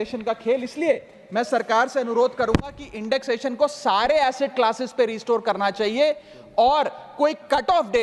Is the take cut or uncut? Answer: uncut